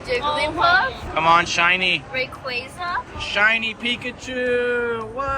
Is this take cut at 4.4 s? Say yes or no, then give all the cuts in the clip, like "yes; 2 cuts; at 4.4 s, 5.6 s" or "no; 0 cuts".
no; 1 cut; at 3.1 s